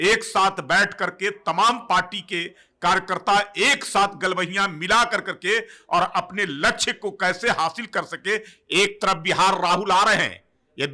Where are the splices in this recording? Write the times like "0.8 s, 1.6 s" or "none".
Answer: 8.6 s